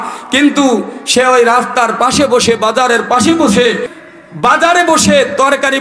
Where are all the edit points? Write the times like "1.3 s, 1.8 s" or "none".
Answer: 3.9 s